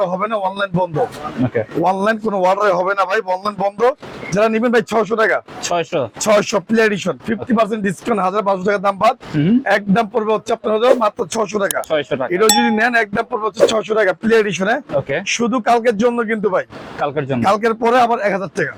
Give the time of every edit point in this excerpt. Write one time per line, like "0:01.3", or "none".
none